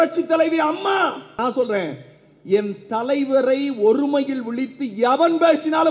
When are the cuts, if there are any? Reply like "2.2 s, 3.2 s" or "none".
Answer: 1.3 s